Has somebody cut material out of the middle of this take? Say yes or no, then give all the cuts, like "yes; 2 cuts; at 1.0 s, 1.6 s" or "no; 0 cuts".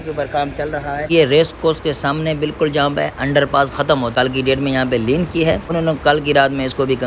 yes; 3 cuts; at 1.1 s, 4.1 s, 5.7 s